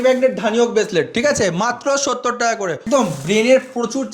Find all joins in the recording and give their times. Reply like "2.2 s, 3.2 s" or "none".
2.8 s